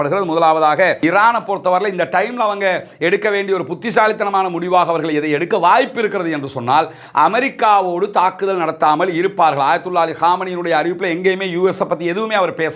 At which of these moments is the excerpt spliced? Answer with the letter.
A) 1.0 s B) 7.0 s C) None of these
A